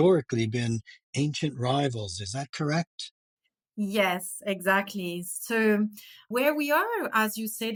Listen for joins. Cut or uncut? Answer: uncut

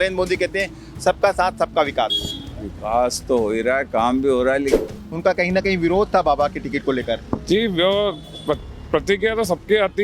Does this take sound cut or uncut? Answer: cut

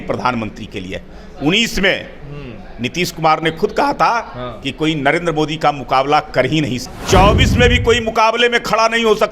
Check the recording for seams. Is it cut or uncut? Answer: cut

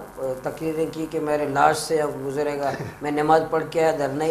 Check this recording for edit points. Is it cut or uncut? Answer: uncut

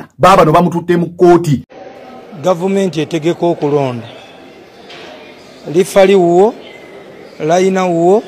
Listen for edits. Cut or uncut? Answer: cut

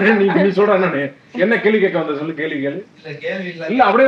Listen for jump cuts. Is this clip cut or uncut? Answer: uncut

